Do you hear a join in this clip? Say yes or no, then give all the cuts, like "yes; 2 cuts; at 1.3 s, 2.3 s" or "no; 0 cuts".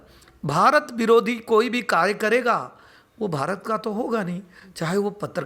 no; 0 cuts